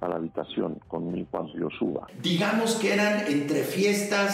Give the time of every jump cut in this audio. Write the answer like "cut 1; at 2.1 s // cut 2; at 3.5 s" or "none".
cut 1; at 2.1 s